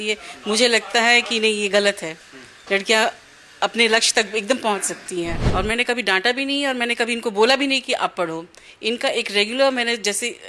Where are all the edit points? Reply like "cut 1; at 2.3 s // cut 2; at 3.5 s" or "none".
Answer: cut 1; at 5.4 s